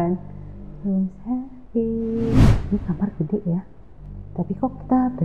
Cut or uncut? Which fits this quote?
cut